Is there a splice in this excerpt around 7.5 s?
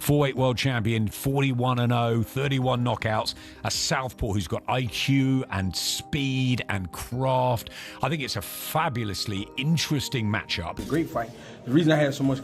no; 1 cut; at 10.8 s

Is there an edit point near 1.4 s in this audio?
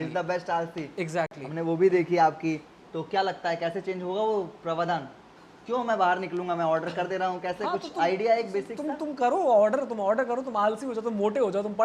no; 0 cuts

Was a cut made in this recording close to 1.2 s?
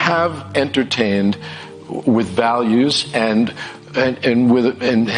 no; 0 cuts

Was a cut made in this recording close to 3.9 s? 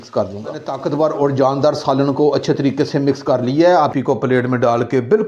yes; 1 cut; at 3.9 s

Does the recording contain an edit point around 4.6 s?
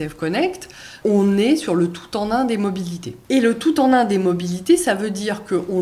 no; 2 cuts; at 0.9 s, 3.1 s

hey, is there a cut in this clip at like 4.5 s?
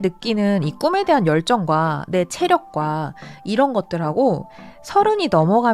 no; 0 cuts

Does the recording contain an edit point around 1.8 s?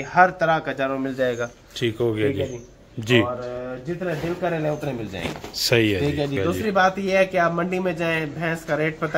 no; 1 cut; at 6.4 s

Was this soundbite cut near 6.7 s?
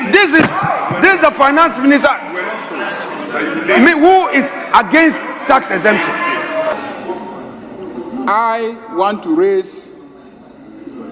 yes; 1 cut; at 6.7 s

